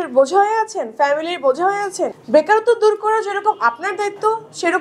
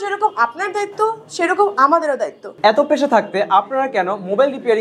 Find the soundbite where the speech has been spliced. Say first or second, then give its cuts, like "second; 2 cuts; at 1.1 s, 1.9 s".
second; 1 cut; at 2.5 s